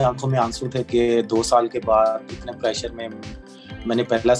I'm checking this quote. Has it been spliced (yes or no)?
no